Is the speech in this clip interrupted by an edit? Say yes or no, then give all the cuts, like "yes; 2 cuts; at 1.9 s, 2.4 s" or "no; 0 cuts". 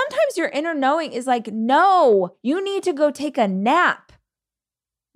yes; 1 cut; at 2.4 s